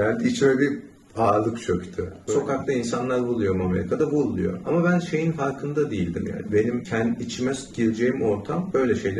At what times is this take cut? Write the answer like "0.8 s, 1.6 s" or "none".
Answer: 2.1 s